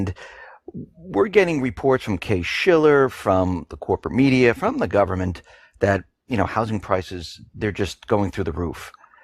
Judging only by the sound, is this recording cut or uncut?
uncut